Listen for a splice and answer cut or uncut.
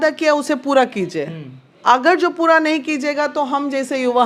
uncut